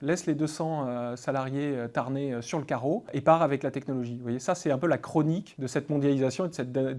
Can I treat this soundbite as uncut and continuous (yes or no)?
yes